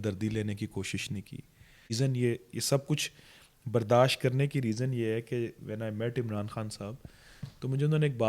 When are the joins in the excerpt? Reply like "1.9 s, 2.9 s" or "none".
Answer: 2.0 s